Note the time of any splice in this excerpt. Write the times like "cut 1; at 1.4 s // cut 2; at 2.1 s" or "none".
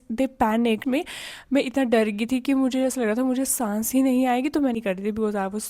cut 1; at 0.8 s // cut 2; at 4.8 s